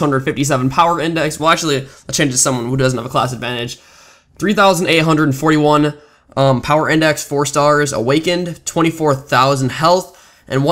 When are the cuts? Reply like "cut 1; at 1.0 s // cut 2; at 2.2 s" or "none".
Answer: none